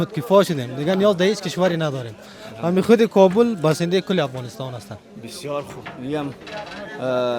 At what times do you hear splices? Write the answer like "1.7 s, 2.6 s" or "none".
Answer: none